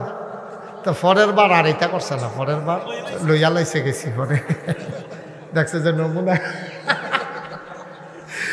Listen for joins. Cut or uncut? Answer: uncut